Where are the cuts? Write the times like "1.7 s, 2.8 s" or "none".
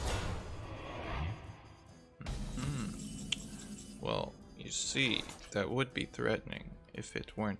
none